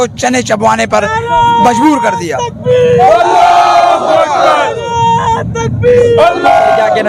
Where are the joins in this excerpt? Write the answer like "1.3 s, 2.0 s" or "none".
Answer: none